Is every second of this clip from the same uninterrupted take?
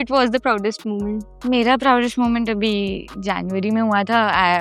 yes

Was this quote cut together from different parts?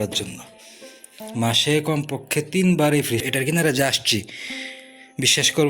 yes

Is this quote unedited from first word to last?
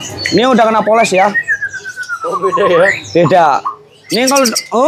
yes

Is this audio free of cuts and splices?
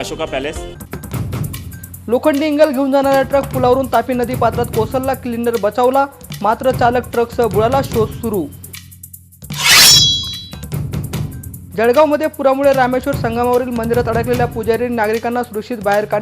no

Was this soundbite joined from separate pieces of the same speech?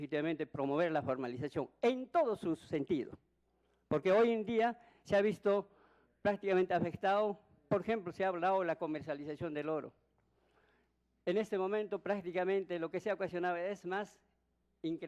no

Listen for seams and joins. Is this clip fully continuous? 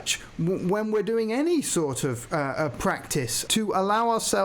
no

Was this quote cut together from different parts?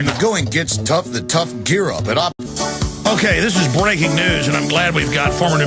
no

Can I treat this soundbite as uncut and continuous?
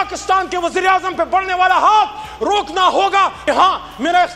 no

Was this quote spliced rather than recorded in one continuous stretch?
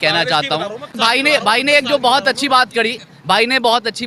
yes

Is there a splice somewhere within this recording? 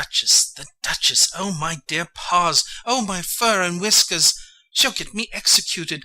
yes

